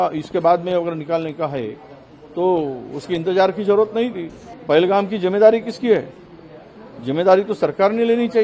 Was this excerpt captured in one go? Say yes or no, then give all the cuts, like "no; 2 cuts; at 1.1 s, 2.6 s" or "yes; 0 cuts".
no; 1 cut; at 4.5 s